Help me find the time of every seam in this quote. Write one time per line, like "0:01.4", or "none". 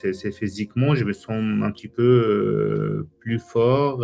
none